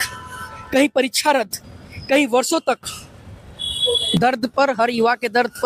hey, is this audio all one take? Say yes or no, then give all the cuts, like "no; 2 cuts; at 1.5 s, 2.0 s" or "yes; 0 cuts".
no; 1 cut; at 4.2 s